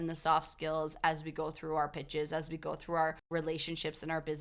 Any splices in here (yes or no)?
no